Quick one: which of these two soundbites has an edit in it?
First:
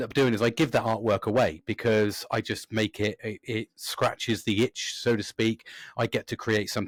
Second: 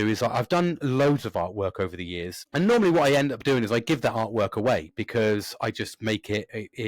second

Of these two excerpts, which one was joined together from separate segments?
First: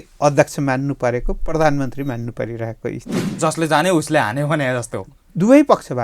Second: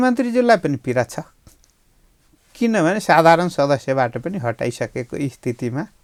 first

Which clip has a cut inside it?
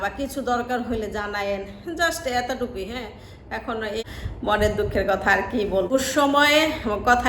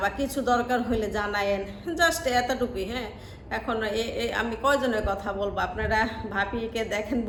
first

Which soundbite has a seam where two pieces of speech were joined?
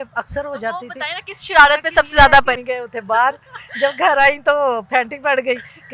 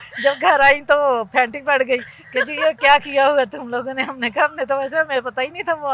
first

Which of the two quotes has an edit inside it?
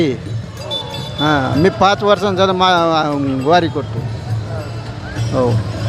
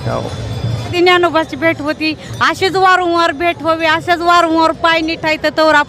second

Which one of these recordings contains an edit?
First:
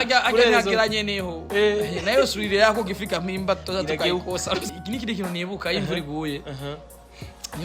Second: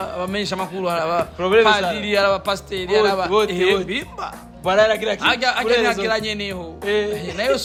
first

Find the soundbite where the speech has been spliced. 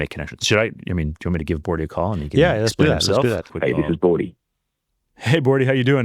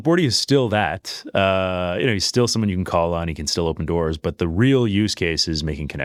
first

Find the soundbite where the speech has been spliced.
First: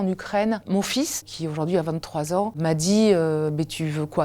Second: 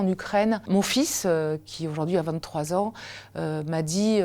first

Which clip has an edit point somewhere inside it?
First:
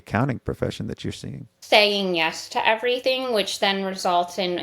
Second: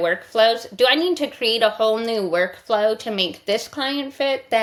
first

